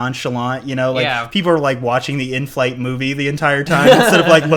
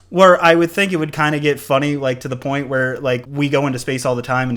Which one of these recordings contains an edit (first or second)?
second